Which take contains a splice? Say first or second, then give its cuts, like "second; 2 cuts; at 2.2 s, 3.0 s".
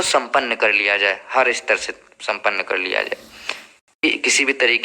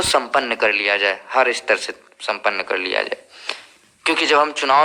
first; 1 cut; at 3.9 s